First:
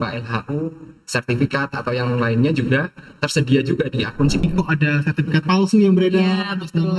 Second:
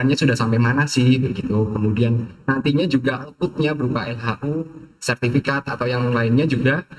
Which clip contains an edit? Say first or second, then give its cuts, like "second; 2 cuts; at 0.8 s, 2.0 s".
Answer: first; 1 cut; at 4.4 s